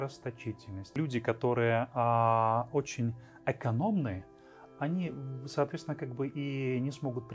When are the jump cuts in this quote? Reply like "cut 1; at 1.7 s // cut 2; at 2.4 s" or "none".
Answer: cut 1; at 1.0 s